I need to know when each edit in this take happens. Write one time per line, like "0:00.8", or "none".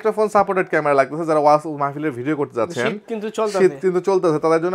none